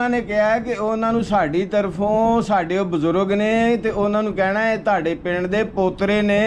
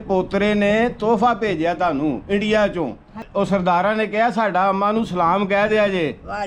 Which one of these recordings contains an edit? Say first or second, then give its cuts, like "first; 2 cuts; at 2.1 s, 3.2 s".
second; 1 cut; at 3.2 s